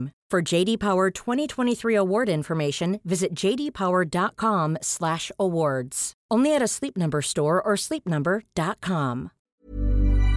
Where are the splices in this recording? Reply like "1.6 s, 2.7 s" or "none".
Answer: 9.4 s